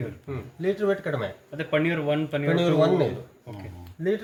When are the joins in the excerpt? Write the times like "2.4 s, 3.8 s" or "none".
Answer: none